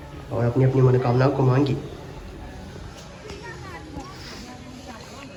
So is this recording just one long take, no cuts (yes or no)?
yes